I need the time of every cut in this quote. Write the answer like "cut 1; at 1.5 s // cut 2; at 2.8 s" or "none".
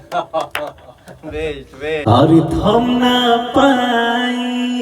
cut 1; at 2.0 s